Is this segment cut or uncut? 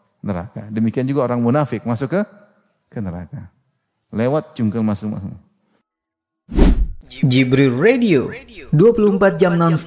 cut